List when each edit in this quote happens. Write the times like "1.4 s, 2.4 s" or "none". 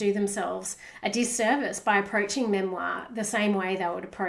none